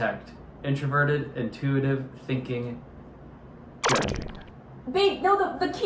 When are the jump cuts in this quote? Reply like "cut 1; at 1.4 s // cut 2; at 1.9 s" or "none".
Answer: none

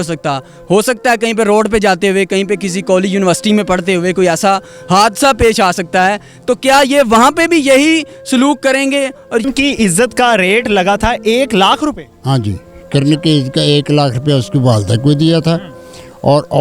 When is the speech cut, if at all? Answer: cut 1; at 9.4 s

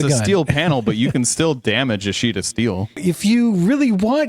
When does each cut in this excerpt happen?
cut 1; at 3.0 s

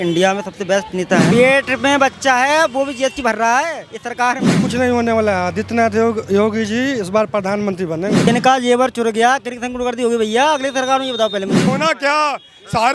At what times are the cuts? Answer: cut 1; at 1.3 s // cut 2; at 4.6 s // cut 3; at 8.3 s // cut 4; at 11.7 s

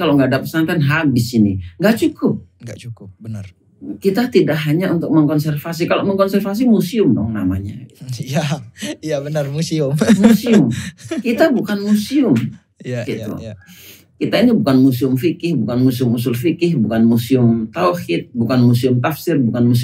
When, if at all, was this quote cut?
none

